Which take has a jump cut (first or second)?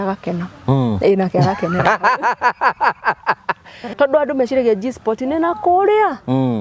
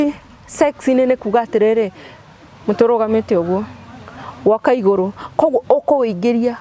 first